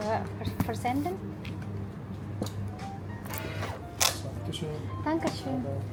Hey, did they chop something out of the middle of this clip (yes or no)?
no